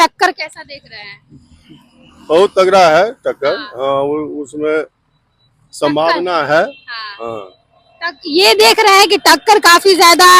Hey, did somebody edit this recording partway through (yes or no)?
no